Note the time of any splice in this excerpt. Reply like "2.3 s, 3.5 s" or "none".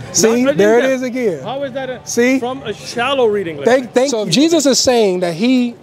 4.2 s